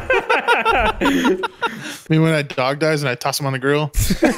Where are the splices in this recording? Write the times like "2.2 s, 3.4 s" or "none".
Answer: 1.9 s

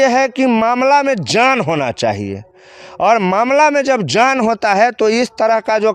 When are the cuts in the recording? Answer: none

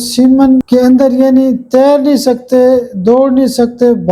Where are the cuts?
none

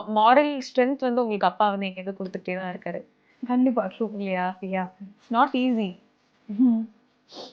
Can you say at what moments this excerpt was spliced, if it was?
5.1 s

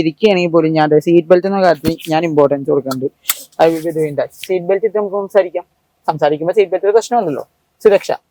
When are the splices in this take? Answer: none

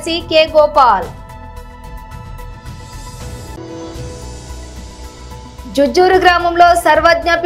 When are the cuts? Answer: 1.1 s, 3.5 s, 4.9 s

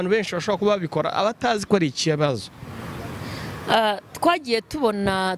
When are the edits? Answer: none

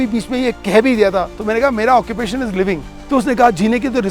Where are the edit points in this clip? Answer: 1.3 s, 2.9 s

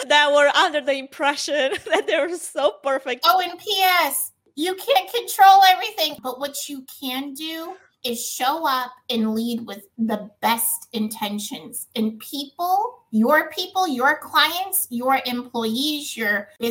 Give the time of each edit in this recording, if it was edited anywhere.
3.1 s, 6.1 s

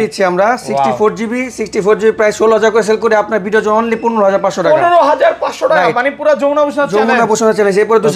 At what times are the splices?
none

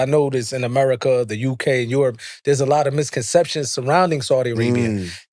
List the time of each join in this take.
none

